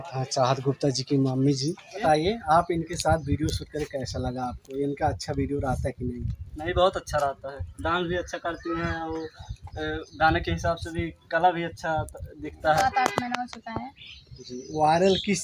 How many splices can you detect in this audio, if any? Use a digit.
2